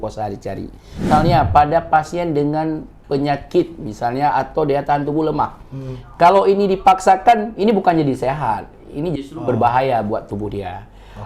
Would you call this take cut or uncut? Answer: cut